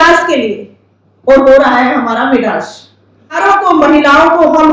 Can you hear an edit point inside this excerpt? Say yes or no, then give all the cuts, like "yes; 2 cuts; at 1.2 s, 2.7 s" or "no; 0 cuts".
yes; 1 cut; at 3.4 s